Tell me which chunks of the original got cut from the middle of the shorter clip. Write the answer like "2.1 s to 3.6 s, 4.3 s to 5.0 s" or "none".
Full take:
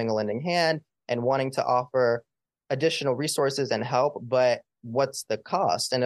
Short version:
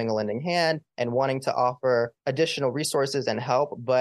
0.9 s to 1.0 s, 2.3 s to 2.6 s